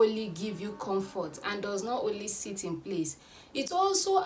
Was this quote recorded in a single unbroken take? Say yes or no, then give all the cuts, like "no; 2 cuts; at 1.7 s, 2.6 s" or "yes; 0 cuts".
yes; 0 cuts